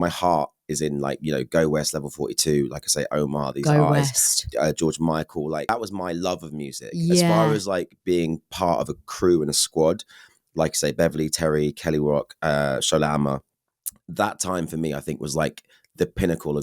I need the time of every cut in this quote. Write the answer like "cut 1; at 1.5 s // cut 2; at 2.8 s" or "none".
cut 1; at 5.7 s